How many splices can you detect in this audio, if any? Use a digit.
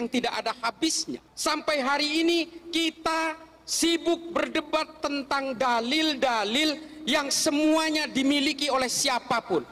1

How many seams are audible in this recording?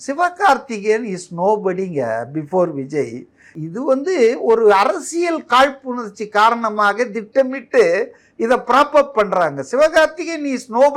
1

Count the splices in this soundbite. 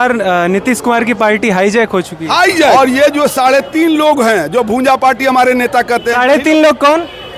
1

